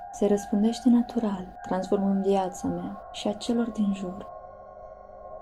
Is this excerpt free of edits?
yes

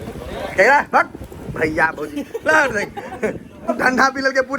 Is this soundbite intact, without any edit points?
no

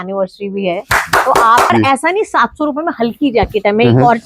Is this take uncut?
no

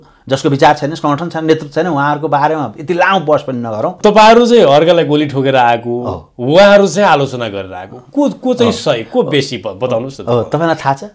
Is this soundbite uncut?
no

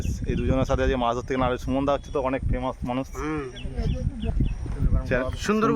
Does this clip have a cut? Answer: yes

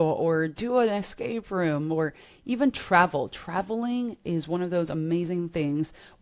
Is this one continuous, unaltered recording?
yes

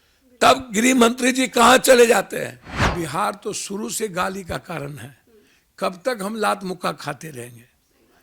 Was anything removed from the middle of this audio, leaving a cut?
yes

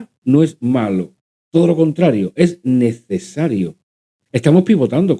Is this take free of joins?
yes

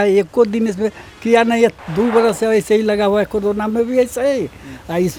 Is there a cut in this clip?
no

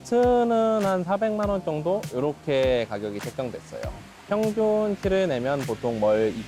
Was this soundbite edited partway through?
yes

